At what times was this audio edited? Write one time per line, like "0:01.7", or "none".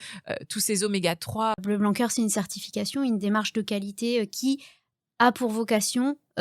0:01.6